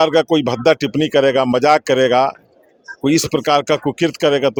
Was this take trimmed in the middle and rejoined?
no; 0 cuts

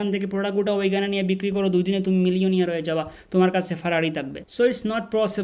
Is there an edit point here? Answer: no; 0 cuts

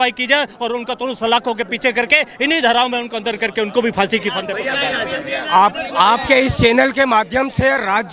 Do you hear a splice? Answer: no; 0 cuts

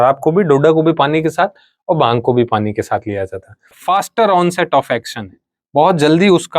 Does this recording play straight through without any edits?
no; 1 cut; at 3.7 s

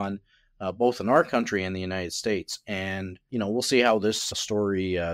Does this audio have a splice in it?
yes; 2 cuts; at 3.3 s, 4.3 s

